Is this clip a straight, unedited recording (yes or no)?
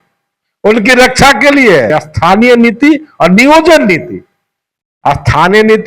no